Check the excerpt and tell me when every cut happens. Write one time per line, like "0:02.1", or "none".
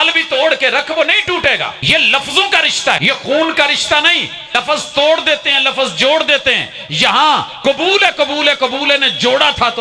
0:01.8
0:03.0
0:04.5